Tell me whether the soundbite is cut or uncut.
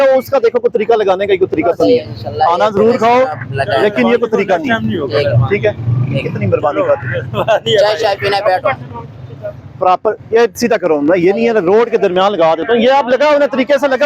uncut